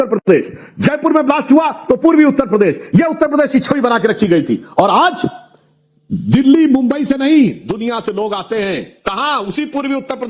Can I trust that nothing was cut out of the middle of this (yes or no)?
yes